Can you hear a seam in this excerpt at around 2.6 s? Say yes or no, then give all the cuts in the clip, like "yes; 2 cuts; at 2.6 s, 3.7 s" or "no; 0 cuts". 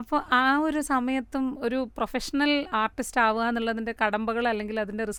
no; 0 cuts